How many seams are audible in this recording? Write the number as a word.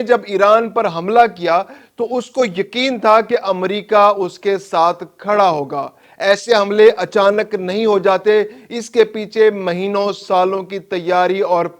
zero